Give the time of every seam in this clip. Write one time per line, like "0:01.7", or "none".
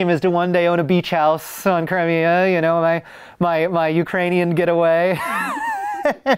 none